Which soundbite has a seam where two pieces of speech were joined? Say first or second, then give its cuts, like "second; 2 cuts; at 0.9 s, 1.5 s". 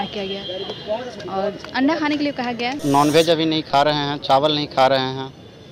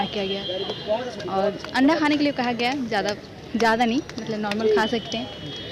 first; 1 cut; at 2.8 s